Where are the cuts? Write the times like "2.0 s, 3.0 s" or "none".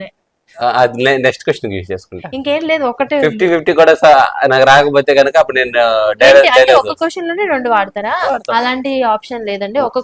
none